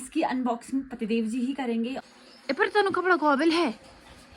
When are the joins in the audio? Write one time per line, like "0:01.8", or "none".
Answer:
0:02.0